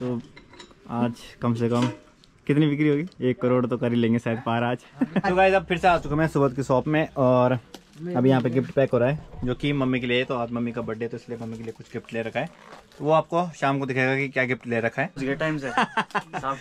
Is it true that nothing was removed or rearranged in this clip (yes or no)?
no